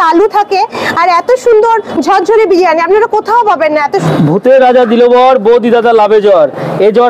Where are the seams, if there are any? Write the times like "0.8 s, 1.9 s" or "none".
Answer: 4.1 s

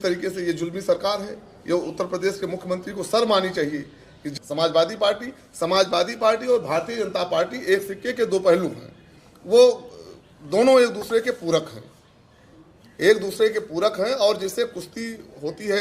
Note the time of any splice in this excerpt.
4.3 s

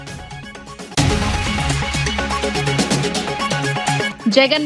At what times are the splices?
0.9 s, 2.3 s, 3.7 s

